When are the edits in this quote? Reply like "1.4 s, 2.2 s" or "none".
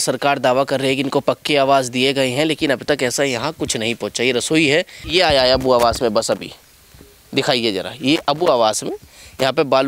5.0 s